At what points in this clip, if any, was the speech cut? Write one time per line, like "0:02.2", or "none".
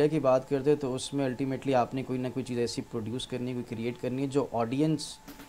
none